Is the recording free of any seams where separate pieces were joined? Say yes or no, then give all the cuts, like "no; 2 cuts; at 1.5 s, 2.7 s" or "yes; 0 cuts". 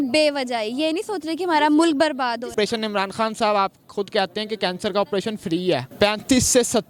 no; 2 cuts; at 2.5 s, 5.9 s